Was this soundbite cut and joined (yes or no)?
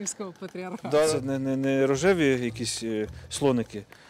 yes